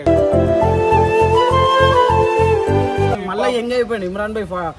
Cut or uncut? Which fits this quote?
cut